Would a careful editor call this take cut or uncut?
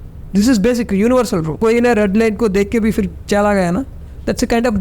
cut